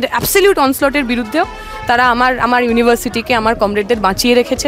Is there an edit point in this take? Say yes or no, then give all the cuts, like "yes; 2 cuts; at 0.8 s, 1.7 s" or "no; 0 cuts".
no; 0 cuts